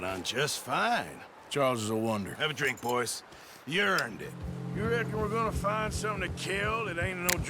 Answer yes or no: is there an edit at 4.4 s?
yes